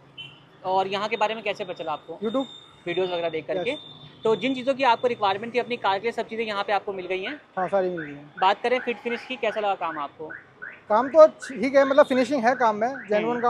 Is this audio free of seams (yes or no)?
yes